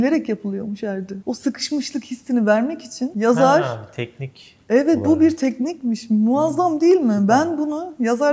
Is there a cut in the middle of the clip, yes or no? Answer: no